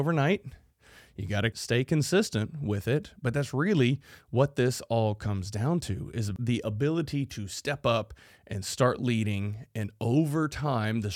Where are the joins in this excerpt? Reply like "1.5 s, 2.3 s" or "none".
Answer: 1.5 s, 6.3 s